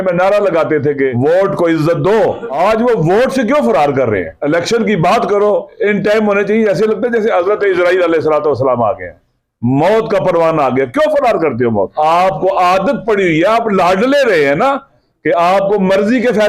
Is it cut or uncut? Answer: cut